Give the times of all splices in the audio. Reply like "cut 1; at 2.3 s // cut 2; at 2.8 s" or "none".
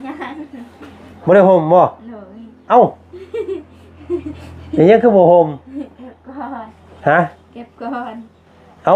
none